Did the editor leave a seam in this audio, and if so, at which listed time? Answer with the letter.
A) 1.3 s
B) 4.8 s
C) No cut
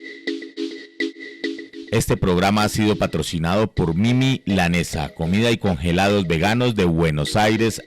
A